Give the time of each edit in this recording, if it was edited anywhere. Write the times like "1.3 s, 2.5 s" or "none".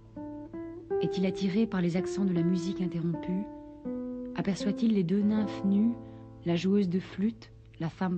3.2 s